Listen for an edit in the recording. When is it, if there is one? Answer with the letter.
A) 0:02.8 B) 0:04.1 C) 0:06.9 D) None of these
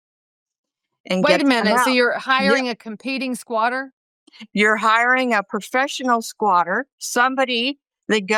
D